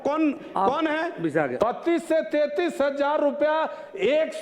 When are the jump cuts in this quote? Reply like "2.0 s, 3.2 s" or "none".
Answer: 1.5 s